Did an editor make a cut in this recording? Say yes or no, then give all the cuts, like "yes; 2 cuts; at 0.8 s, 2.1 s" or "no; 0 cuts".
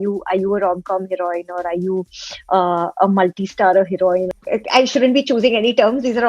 yes; 1 cut; at 4.3 s